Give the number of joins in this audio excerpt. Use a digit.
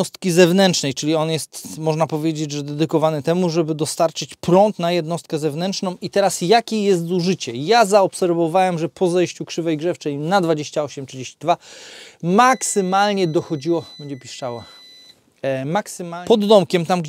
1